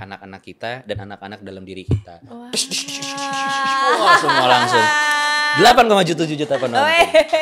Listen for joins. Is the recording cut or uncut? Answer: uncut